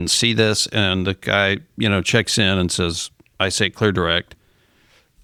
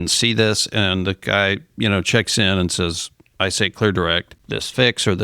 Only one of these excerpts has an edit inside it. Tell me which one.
second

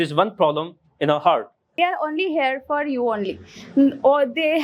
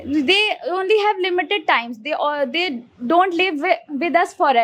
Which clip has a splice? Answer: first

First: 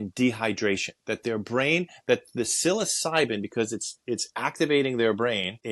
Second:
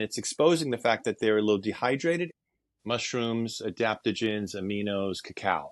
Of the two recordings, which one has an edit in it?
second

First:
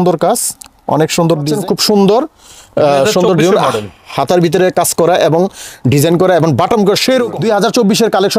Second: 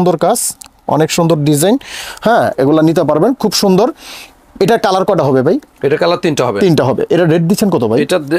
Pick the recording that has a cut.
first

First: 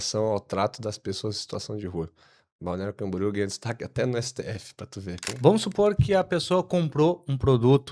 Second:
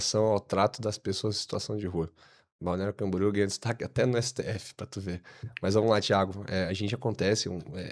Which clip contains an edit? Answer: first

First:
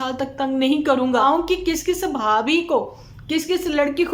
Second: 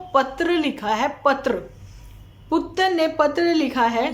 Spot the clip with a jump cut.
first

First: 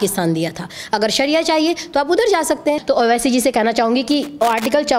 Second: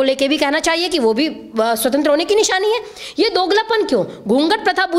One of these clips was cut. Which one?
first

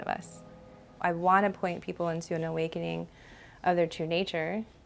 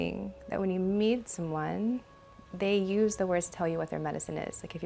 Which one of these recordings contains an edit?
first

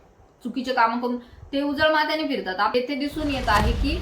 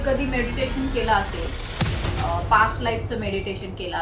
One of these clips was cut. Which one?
first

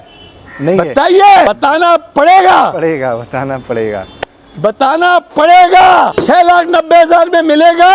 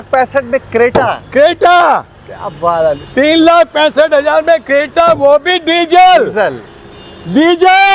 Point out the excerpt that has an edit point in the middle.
first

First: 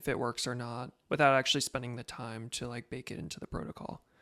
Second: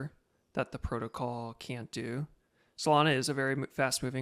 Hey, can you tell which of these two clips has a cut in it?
first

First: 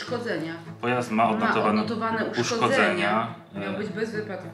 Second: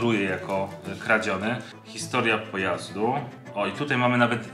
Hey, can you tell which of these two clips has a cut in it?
second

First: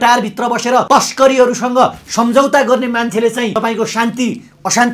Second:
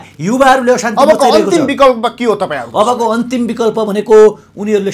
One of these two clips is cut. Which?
first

